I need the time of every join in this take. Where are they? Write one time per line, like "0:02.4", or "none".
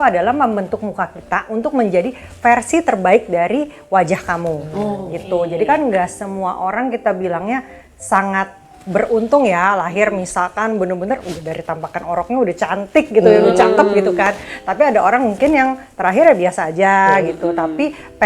none